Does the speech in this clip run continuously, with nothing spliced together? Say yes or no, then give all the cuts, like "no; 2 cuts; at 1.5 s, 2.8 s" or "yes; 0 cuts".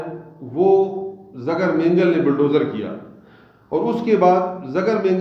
yes; 0 cuts